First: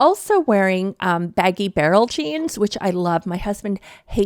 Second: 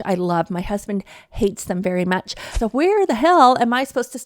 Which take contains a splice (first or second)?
second